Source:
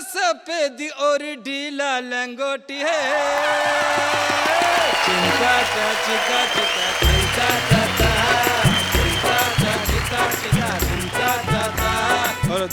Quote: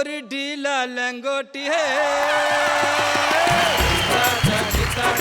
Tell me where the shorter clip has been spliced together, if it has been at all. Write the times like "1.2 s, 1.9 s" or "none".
3.9 s